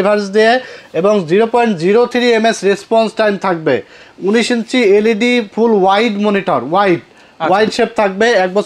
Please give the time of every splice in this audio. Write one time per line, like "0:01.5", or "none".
none